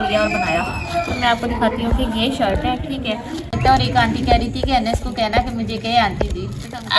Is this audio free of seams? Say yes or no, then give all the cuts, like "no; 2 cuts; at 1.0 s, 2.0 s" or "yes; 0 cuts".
no; 1 cut; at 3.6 s